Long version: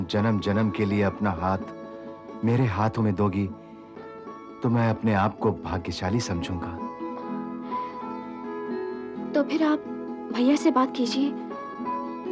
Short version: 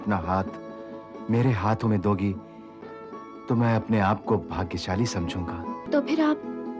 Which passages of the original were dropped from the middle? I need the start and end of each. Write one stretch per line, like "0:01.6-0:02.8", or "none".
0:07.0-0:09.2